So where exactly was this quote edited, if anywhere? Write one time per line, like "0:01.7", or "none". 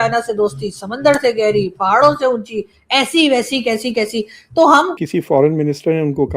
0:05.0